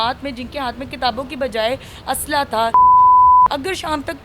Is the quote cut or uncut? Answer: cut